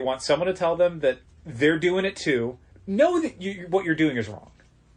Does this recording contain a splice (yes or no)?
yes